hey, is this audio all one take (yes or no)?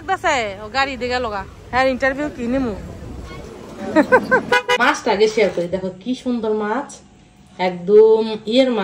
no